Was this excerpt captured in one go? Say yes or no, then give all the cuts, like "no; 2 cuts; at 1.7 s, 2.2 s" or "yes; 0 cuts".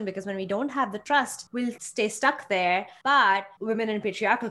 no; 3 cuts; at 1.7 s, 2.9 s, 3.5 s